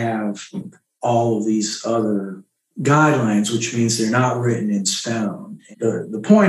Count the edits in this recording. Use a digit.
1